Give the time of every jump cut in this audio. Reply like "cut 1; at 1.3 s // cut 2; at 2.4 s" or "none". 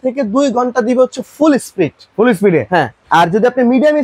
cut 1; at 3.0 s